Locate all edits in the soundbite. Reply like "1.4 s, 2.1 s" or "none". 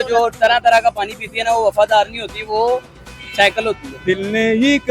3.9 s